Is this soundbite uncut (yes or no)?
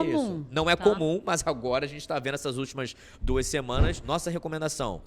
no